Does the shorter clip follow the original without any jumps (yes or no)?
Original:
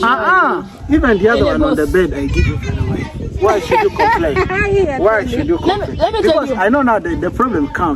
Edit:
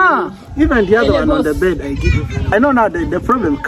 no